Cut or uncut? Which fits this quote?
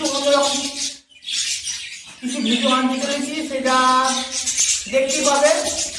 uncut